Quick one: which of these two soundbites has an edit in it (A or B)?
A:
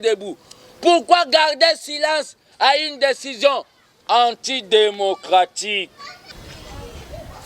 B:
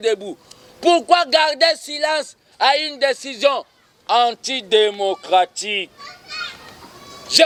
A